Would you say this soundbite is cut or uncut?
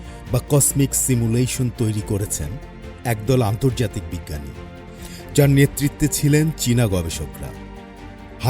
uncut